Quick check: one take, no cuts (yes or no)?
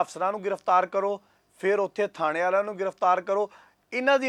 yes